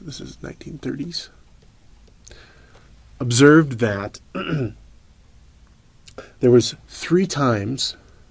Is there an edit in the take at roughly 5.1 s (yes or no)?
yes